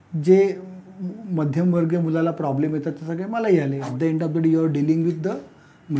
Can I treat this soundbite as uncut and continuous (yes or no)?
no